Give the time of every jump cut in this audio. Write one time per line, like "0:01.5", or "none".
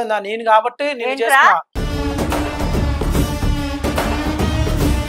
none